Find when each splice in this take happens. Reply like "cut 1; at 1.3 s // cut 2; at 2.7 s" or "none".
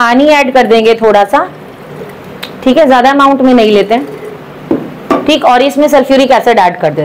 none